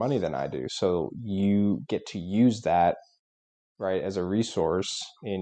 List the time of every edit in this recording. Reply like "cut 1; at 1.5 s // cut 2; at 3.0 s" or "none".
none

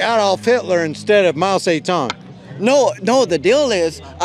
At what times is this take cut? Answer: none

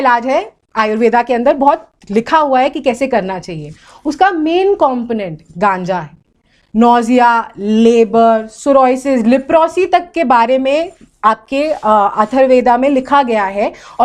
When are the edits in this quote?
none

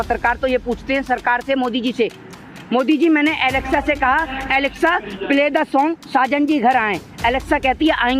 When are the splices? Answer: none

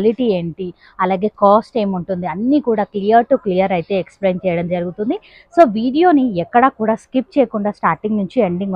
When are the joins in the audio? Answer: none

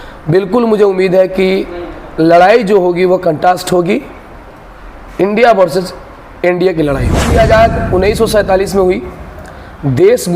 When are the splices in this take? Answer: cut 1; at 7.2 s

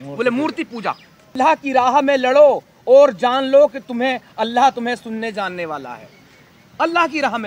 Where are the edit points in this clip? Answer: cut 1; at 1.3 s

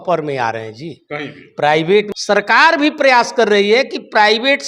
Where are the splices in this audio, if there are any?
cut 1; at 2.1 s

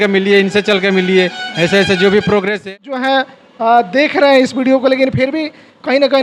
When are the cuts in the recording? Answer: cut 1; at 2.7 s

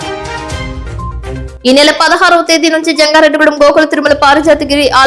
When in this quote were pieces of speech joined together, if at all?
cut 1; at 1.5 s

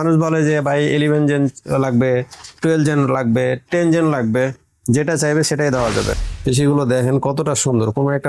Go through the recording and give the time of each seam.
cut 1; at 6.3 s

